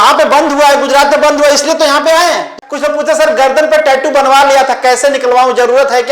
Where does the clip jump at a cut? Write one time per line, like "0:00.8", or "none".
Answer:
0:02.6